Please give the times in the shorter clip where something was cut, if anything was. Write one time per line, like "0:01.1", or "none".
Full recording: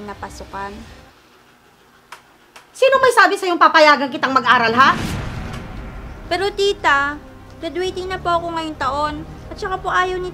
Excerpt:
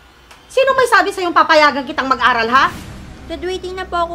0:02.9